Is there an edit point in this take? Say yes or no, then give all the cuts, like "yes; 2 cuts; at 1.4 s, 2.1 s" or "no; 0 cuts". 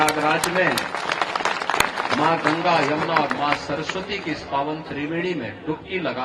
no; 0 cuts